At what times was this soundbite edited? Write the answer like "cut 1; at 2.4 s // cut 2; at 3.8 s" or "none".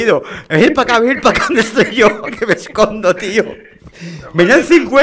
none